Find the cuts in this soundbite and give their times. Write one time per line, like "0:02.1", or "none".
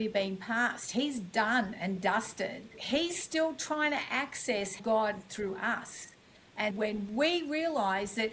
0:02.8
0:04.8
0:06.7